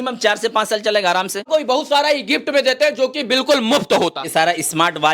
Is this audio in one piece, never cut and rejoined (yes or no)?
no